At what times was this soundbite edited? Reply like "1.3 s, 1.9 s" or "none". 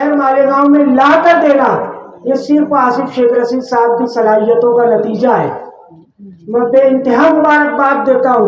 none